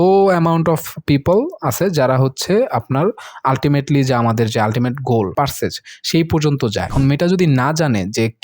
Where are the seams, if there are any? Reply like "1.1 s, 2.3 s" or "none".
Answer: 5.3 s, 6.9 s

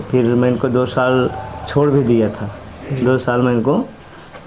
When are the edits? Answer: none

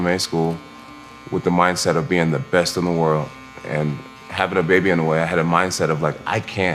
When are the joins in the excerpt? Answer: none

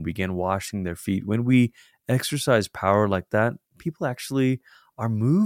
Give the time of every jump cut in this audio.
none

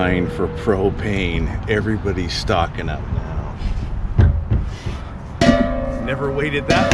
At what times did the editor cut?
3.5 s

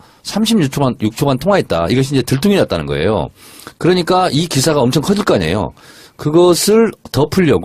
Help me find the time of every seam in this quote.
1.2 s

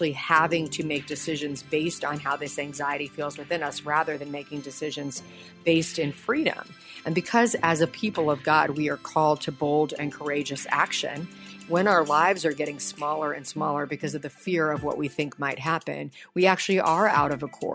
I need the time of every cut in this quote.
11.5 s

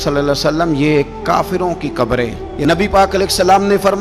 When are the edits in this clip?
2.4 s

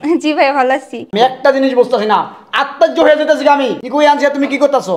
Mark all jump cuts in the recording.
1.1 s, 3.8 s

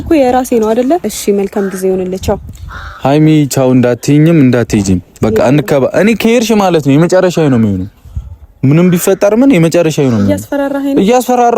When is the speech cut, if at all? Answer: 1.0 s

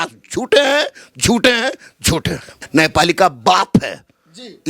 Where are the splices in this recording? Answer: 2.5 s

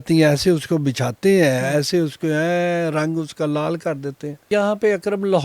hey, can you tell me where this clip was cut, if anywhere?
4.5 s

